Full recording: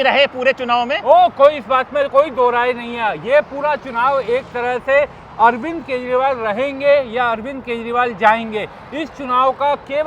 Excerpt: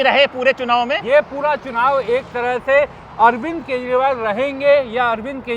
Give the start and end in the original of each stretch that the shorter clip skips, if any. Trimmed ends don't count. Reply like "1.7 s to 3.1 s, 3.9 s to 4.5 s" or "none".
1.0 s to 3.2 s

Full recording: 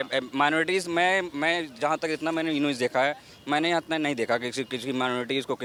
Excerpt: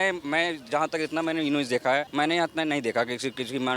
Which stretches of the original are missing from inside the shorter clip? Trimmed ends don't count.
3.2 s to 3.4 s

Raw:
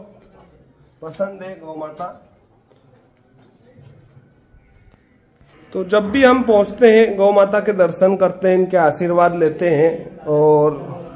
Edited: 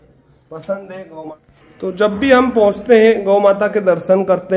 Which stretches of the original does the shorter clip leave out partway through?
1.8 s to 5.3 s

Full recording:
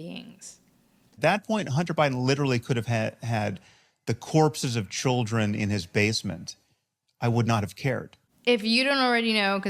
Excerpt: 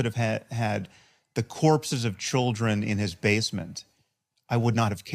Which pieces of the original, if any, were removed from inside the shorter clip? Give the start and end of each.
none

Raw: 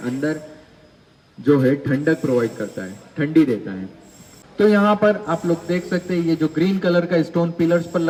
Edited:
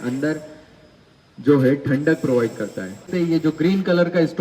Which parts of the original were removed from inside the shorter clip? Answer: 3.1 s to 6.0 s

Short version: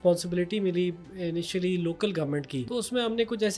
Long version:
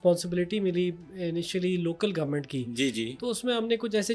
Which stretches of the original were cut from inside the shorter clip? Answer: 2.7 s to 3.2 s

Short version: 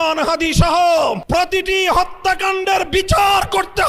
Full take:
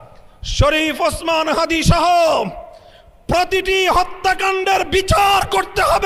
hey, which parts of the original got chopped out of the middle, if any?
2.5 s to 3.2 s

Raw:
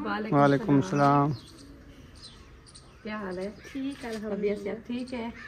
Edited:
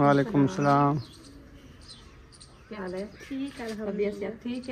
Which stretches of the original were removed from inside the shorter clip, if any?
3.1 s to 3.2 s

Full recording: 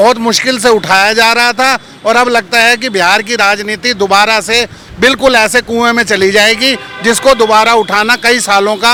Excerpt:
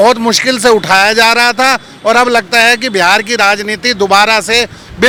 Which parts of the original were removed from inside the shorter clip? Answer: none

